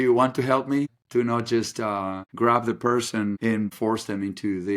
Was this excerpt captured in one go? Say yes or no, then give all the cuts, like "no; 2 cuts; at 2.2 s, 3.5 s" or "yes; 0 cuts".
no; 3 cuts; at 1.0 s, 2.2 s, 3.6 s